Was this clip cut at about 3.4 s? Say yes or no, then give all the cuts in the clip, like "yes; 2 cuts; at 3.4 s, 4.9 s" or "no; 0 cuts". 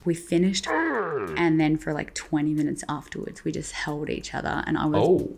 no; 1 cut; at 0.9 s